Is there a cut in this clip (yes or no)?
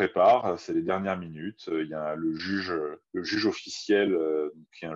yes